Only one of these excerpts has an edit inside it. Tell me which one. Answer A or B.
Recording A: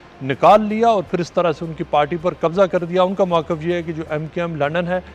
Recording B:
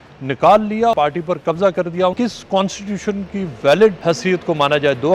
B